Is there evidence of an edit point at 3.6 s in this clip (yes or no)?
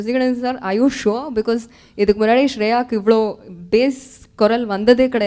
no